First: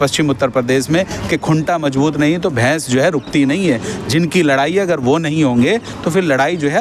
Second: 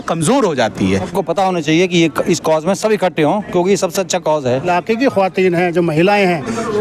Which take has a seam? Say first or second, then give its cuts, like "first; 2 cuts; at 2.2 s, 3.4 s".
second; 2 cuts; at 0.9 s, 4.6 s